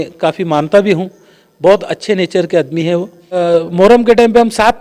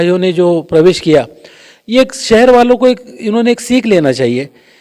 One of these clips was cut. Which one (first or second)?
first